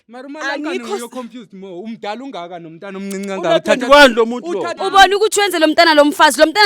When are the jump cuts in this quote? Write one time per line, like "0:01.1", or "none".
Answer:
0:04.7